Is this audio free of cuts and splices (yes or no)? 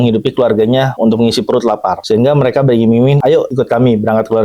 no